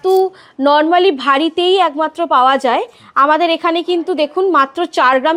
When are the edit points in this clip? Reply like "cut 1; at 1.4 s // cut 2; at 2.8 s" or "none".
none